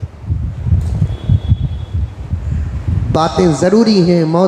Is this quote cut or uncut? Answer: uncut